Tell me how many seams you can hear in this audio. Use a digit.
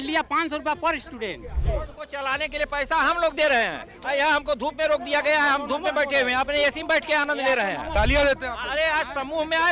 2